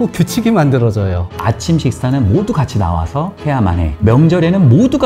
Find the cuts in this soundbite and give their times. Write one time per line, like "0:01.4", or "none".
0:01.4
0:04.0